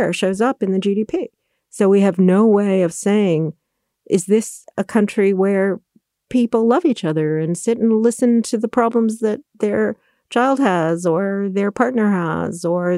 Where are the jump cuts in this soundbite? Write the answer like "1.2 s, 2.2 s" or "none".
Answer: none